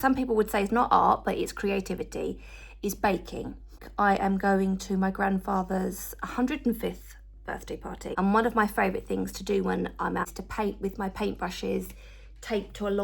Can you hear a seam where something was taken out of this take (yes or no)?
yes